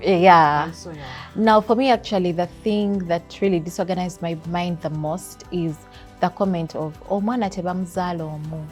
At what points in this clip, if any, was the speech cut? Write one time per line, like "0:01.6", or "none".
none